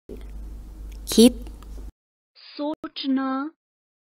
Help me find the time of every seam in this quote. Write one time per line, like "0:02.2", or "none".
0:02.8